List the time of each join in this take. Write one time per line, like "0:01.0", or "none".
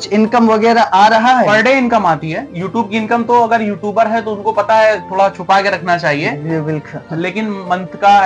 0:01.5